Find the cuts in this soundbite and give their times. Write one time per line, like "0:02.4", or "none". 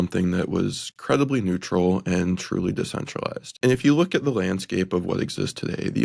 0:03.4